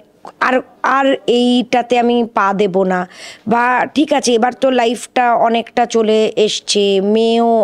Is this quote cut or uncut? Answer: uncut